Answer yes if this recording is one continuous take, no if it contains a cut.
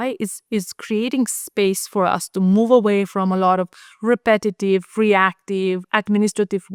yes